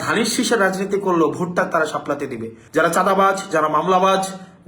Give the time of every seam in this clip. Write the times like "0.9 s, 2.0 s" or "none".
2.5 s